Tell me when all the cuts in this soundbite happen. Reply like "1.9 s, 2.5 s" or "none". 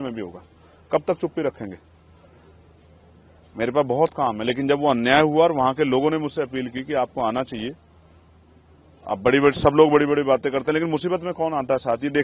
none